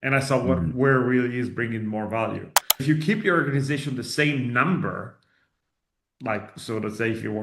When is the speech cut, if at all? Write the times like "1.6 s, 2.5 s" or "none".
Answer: 2.8 s